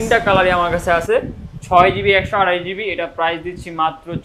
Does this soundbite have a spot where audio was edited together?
no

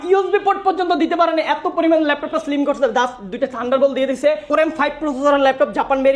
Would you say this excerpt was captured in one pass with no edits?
yes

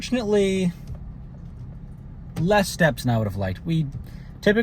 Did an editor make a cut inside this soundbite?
no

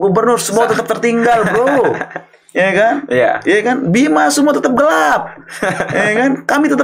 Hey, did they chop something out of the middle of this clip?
no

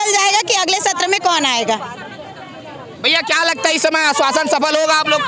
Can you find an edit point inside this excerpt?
no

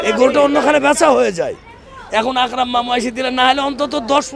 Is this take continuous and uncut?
yes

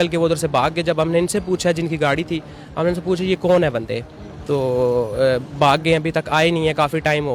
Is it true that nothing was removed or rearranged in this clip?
yes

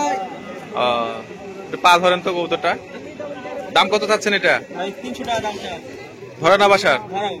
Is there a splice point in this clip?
no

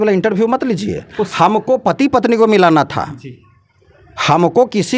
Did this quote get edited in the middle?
no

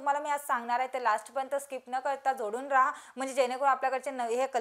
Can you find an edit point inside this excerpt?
no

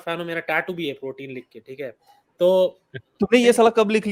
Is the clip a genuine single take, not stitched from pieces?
yes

